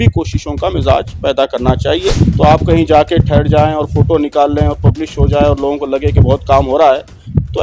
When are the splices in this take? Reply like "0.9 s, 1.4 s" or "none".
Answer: 2.2 s